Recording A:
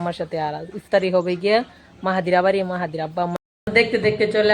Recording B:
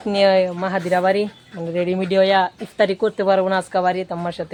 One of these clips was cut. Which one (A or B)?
A